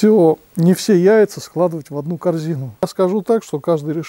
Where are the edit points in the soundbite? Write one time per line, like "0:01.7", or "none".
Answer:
0:02.8

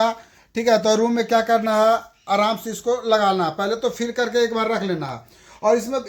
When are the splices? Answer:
none

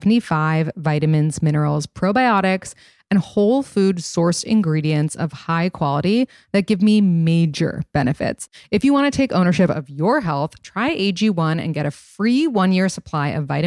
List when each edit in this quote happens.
0:08.4

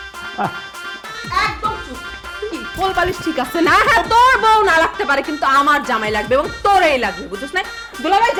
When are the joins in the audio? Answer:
none

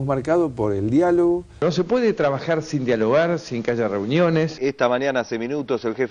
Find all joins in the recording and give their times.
0:01.6
0:04.5

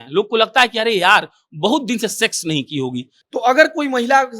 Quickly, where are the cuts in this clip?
0:03.1

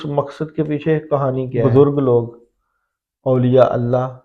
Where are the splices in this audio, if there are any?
0:01.6

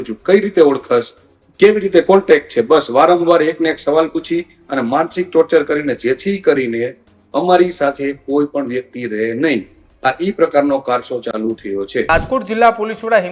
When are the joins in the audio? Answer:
0:12.1

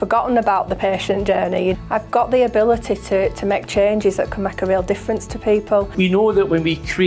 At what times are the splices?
0:05.9

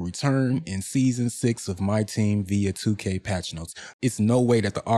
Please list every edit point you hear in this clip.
0:03.9

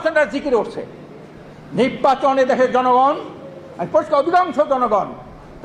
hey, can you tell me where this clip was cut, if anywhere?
none

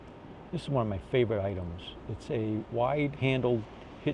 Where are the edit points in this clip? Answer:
none

